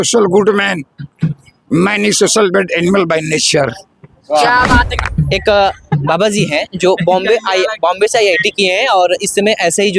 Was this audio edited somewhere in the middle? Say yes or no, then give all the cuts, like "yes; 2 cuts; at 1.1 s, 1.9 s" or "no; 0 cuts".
yes; 1 cut; at 5.0 s